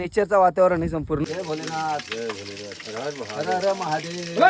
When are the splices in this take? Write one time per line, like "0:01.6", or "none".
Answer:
0:01.2